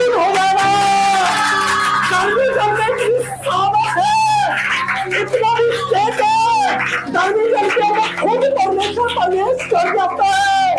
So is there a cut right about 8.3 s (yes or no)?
no